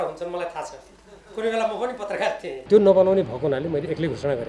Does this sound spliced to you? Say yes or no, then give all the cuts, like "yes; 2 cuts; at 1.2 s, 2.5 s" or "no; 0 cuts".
yes; 1 cut; at 2.5 s